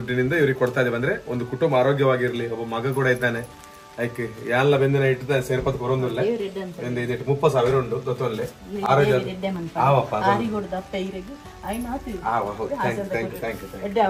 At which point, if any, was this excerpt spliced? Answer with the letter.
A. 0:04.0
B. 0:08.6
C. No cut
C